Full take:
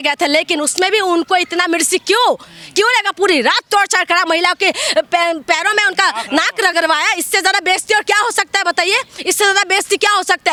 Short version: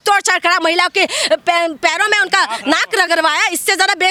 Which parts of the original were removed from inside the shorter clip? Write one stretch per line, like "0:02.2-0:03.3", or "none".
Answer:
none